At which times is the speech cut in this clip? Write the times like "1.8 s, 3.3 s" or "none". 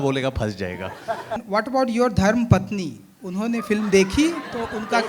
1.4 s